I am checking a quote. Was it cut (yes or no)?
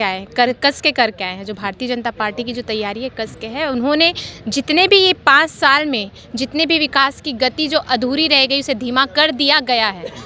no